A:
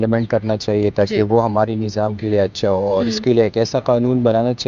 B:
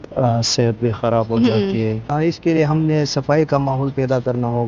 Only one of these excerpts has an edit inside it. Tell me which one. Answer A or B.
B